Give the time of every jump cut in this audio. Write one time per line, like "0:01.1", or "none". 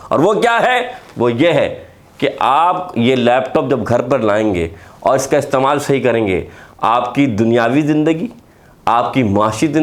none